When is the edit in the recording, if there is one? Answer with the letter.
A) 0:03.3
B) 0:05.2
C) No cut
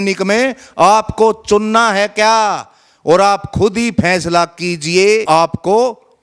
B